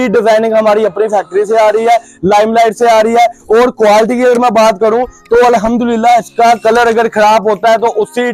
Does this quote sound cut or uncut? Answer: uncut